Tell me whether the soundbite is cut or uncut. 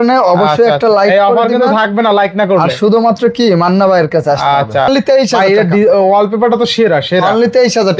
cut